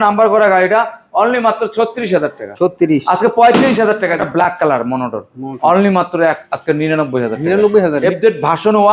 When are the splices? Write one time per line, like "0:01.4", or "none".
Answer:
0:04.1
0:08.0